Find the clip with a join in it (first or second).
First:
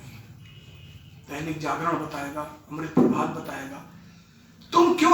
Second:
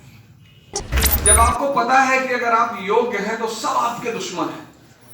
second